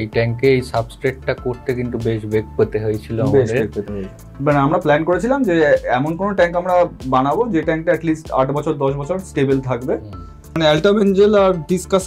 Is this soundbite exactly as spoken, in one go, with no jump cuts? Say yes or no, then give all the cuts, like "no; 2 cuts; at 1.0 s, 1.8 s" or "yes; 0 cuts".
no; 2 cuts; at 4.3 s, 10.5 s